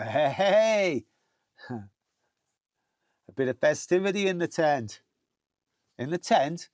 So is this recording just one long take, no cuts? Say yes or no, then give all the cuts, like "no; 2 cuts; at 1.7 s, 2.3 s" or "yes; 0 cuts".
yes; 0 cuts